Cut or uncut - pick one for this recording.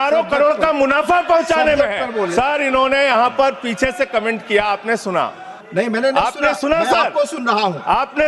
cut